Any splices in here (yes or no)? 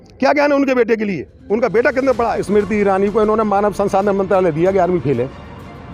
yes